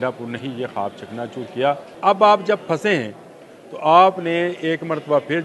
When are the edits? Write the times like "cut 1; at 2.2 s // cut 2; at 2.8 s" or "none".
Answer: cut 1; at 1.9 s